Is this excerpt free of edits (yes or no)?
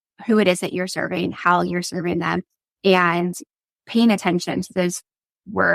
yes